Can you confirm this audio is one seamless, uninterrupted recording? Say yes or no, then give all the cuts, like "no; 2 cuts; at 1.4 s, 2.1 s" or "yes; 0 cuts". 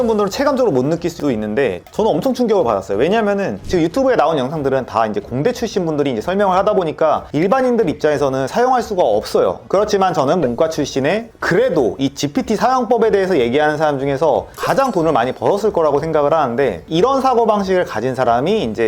no; 1 cut; at 3.6 s